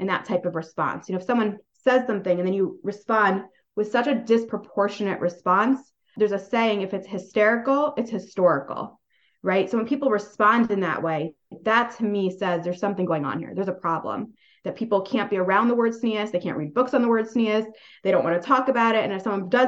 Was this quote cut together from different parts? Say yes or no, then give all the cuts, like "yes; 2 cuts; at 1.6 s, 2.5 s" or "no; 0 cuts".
no; 0 cuts